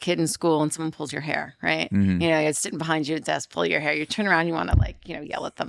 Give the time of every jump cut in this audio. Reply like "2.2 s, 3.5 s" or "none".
none